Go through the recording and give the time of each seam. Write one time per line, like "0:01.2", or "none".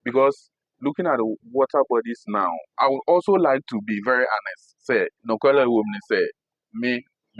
0:05.2